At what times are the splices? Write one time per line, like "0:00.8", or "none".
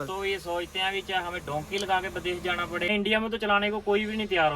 0:02.8